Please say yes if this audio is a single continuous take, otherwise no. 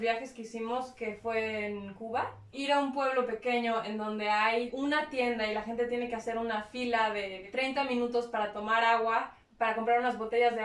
no